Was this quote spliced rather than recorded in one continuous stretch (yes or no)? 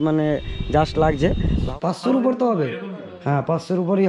yes